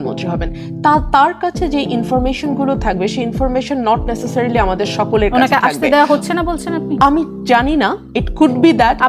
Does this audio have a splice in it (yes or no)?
no